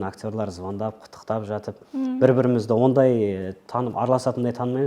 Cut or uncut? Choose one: uncut